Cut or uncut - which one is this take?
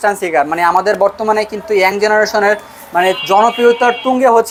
uncut